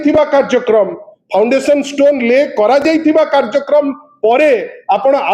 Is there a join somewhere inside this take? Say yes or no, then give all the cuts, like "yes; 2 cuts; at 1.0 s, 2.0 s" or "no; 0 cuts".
no; 0 cuts